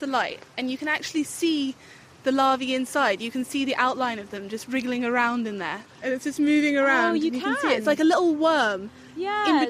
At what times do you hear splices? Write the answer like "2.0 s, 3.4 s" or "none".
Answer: 5.9 s